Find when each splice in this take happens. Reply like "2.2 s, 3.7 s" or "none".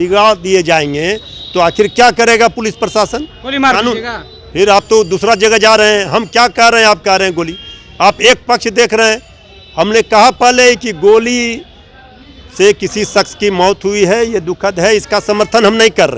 none

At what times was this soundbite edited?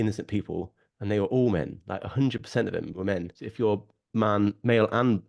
3.4 s

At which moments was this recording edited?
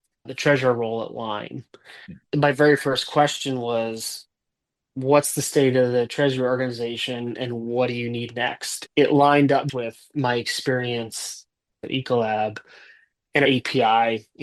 none

